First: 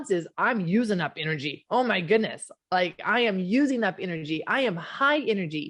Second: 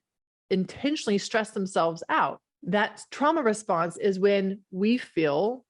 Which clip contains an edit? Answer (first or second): second